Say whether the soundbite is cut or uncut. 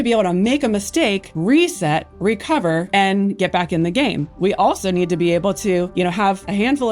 uncut